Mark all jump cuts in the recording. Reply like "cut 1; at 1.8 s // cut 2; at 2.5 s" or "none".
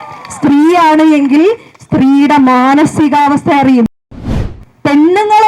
cut 1; at 4.2 s